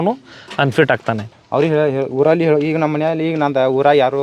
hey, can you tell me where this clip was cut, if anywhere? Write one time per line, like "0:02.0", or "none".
0:01.3